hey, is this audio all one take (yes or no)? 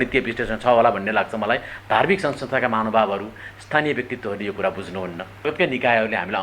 no